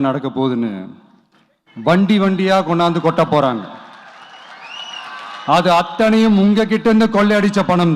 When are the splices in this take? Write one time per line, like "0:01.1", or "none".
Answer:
none